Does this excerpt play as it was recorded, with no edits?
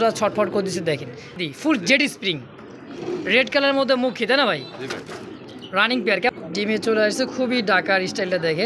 no; 2 cuts; at 1.4 s, 6.3 s

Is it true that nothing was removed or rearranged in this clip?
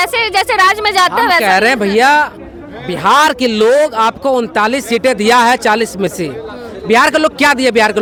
yes; 0 cuts

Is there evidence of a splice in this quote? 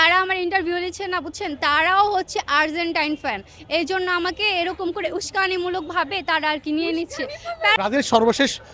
yes; 1 cut; at 7.8 s

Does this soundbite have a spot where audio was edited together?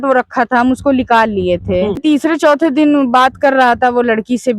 yes; 1 cut; at 2.0 s

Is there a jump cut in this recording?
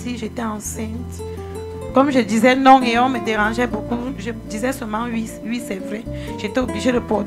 no; 0 cuts

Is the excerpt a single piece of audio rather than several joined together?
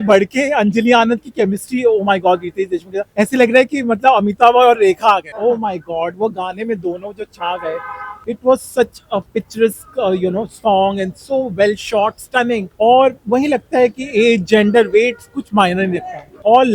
yes; 0 cuts

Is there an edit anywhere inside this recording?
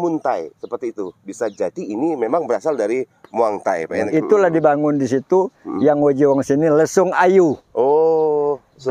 yes; 1 cut; at 4.1 s

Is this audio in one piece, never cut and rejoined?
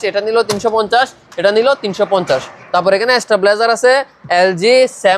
yes; 0 cuts

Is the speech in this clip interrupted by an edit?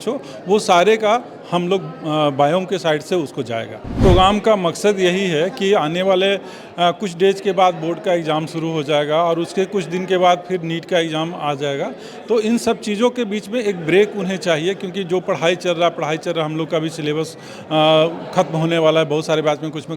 yes; 1 cut; at 3.9 s

